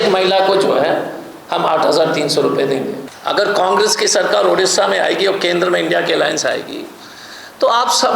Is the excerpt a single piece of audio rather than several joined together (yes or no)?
no